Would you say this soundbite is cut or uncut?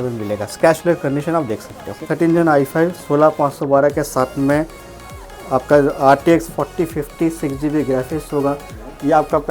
cut